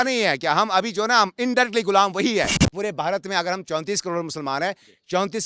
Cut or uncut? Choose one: cut